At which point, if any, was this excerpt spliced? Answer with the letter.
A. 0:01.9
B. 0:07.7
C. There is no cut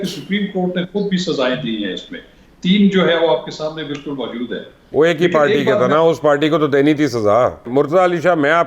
B